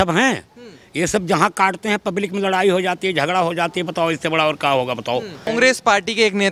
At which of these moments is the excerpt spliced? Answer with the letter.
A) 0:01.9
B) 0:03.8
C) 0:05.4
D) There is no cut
D